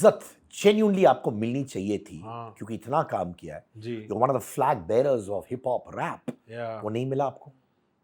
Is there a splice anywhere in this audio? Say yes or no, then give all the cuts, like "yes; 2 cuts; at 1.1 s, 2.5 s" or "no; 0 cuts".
no; 0 cuts